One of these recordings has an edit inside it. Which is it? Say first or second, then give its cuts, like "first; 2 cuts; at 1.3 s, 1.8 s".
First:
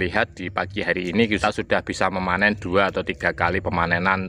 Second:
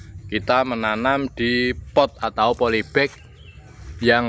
first; 1 cut; at 1.4 s